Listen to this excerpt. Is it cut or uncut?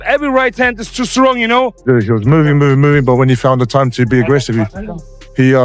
cut